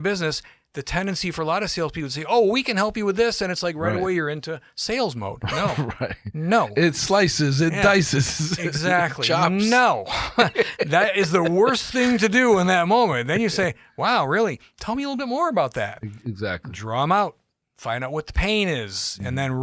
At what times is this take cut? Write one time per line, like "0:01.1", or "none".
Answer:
none